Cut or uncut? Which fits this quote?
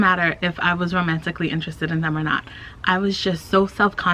uncut